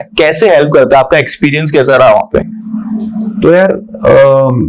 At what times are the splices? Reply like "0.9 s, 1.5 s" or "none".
none